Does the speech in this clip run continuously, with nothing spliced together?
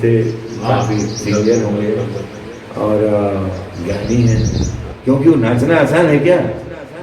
no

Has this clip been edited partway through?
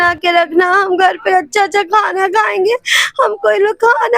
no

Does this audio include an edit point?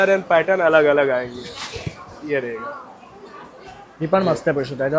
no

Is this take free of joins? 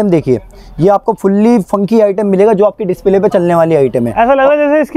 yes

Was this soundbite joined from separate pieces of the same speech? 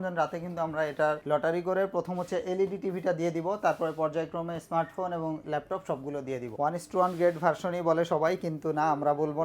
yes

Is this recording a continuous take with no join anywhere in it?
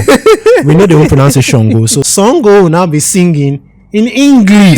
no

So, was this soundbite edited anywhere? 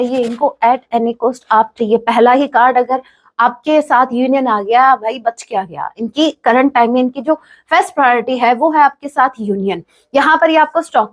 no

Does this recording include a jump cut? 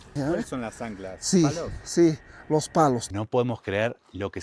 yes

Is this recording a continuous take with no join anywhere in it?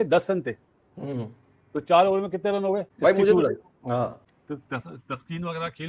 yes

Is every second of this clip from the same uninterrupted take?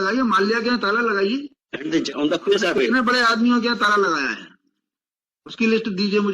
no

